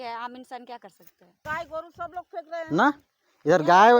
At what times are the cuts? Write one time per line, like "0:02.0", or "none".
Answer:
0:01.3